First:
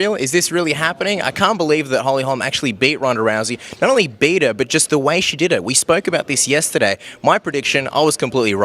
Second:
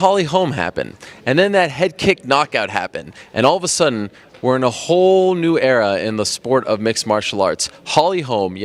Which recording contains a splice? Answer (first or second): first